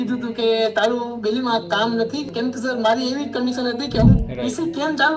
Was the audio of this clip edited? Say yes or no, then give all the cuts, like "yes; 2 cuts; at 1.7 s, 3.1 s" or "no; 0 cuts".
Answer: yes; 2 cuts; at 2.3 s, 4.2 s